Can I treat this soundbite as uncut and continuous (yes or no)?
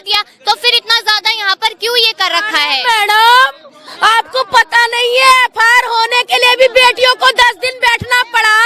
yes